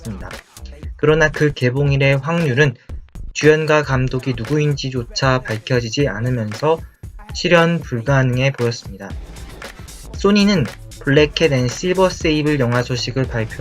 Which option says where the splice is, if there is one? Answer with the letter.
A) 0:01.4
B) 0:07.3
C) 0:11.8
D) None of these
C